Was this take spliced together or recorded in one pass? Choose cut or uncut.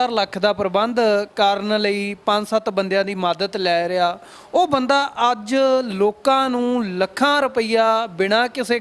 uncut